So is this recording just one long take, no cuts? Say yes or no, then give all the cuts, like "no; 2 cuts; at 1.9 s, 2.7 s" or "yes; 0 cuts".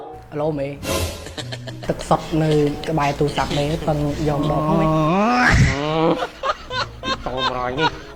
yes; 0 cuts